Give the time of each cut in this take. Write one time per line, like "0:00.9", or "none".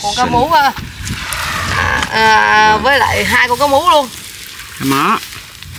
none